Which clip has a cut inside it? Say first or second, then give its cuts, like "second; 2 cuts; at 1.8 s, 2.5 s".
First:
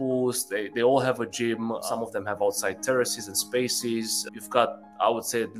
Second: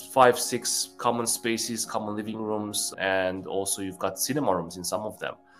second; 1 cut; at 2.8 s